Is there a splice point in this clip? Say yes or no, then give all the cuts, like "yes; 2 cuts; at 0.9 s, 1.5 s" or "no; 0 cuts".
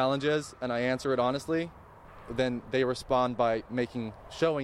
no; 0 cuts